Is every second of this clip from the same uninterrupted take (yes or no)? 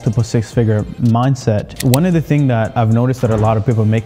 no